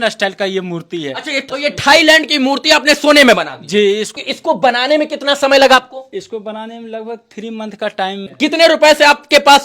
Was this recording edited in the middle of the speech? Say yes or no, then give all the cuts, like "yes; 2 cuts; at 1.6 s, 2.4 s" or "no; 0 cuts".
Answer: yes; 3 cuts; at 1.5 s, 4.2 s, 8.2 s